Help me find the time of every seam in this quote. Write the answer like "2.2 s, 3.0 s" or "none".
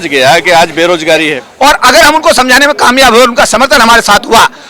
1.4 s